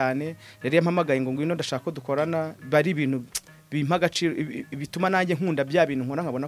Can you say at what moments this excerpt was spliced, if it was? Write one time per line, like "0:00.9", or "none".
none

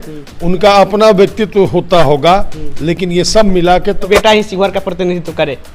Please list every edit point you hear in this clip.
0:04.1

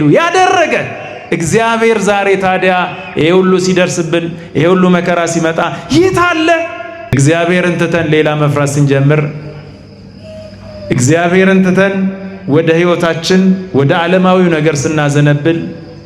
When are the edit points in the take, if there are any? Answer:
0:07.1

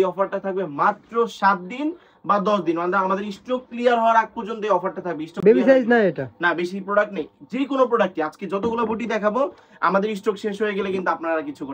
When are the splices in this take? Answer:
none

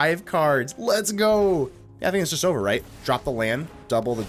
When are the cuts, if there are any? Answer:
0:01.8

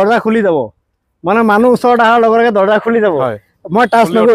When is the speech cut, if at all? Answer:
none

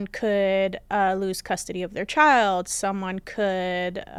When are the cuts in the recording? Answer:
none

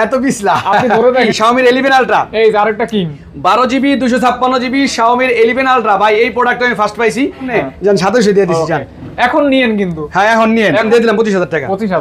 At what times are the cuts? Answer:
0:01.3
0:07.5
0:10.9

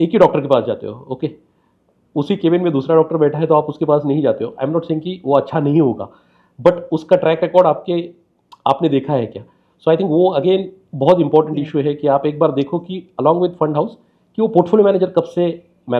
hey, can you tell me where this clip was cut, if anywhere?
none

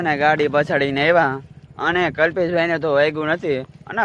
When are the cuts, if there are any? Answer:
none

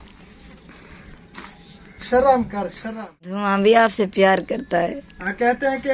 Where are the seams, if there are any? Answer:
0:03.4

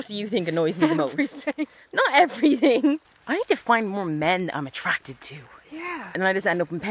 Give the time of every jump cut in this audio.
0:03.1
0:06.2

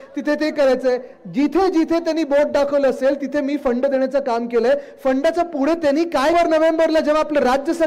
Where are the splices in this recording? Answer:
0:06.3

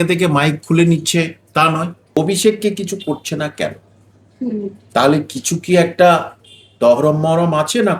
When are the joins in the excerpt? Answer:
0:02.2

